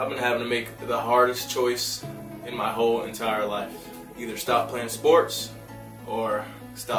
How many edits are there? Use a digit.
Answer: 0